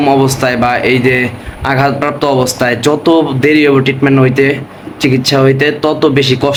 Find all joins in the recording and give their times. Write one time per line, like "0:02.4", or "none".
none

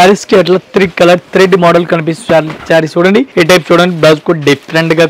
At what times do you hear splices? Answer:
0:03.3

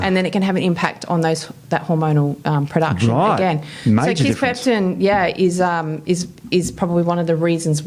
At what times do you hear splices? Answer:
none

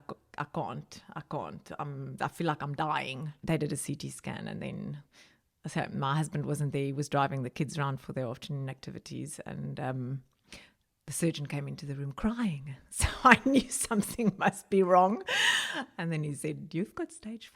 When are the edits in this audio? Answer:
0:02.1
0:03.4

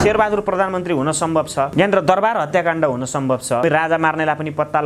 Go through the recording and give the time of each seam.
0:01.7
0:03.6

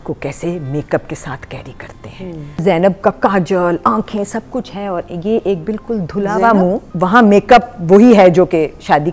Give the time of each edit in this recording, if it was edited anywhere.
0:02.8
0:06.9

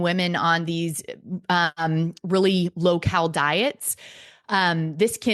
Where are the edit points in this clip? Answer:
none

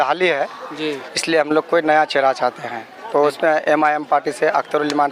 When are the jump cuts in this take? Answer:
none

